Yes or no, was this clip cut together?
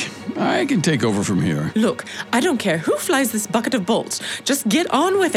yes